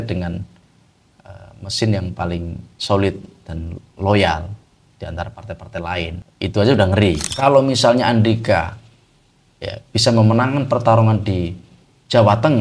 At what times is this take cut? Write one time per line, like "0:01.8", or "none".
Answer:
0:06.2
0:07.3